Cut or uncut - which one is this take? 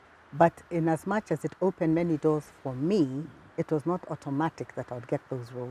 uncut